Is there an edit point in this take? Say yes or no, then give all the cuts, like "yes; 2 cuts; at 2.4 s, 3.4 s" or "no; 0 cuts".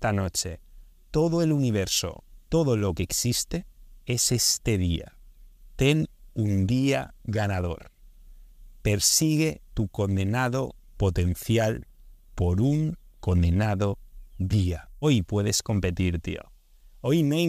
yes; 1 cut; at 15.0 s